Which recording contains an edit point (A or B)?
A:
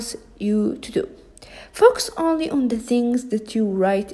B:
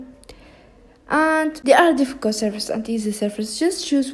B